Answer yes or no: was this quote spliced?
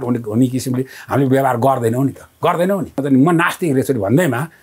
yes